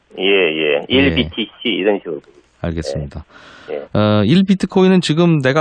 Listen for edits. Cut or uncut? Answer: uncut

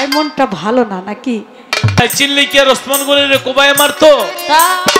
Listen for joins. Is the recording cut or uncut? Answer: cut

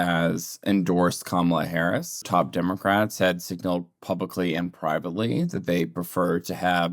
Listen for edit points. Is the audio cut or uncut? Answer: cut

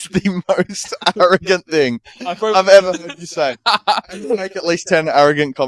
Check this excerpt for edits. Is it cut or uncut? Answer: uncut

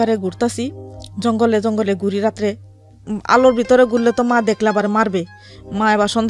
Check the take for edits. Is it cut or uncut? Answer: uncut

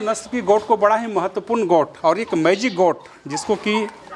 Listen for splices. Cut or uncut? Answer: uncut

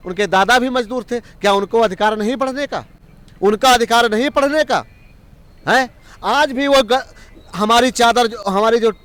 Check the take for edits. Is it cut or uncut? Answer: uncut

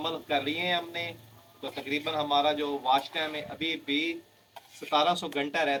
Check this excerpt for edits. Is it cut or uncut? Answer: uncut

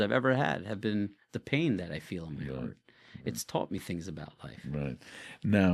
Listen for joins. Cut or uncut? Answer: uncut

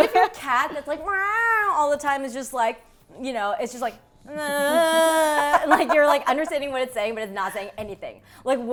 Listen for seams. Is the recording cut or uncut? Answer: uncut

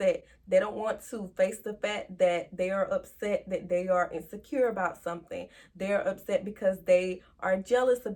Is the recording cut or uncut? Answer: uncut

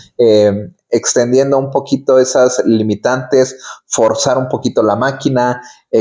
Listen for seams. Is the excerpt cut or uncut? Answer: uncut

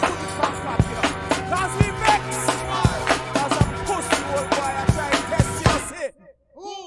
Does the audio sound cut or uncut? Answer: uncut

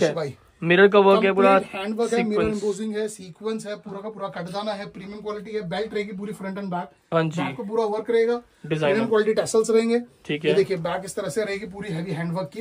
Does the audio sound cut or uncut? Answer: uncut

